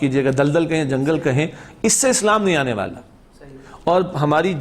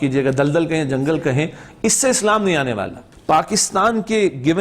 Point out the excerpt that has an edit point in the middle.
second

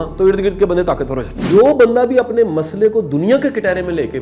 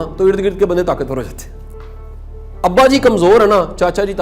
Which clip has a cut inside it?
first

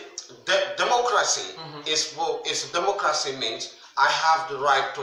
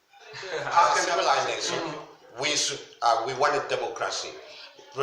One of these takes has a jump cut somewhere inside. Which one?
second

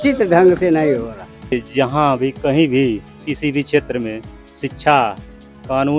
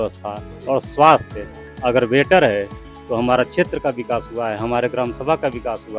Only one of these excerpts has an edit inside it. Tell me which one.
first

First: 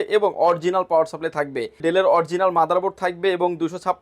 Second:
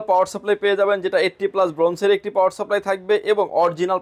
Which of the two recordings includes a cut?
first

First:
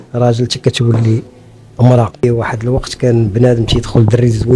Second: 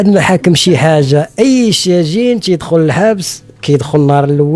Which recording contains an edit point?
first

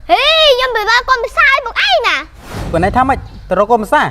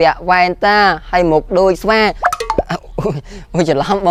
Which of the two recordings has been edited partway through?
first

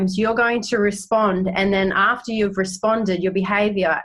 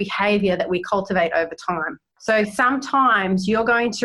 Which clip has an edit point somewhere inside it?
second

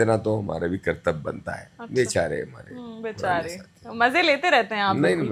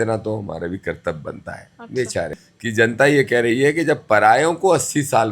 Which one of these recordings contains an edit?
second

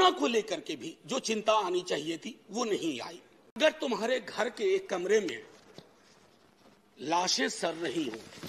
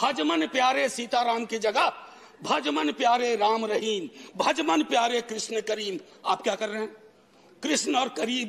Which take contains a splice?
first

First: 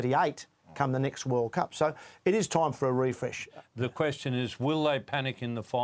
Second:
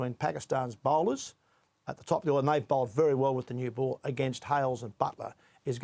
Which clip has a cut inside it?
first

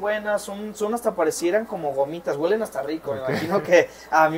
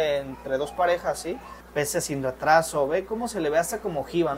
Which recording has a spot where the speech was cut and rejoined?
second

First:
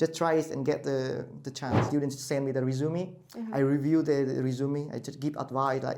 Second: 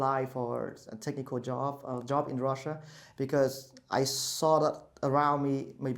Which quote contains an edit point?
first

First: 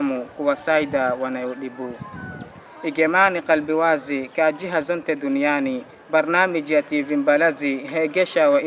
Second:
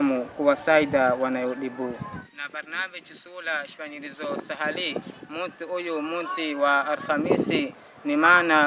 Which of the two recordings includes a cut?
second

